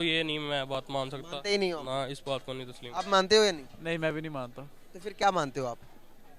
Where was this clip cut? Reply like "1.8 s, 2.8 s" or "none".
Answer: none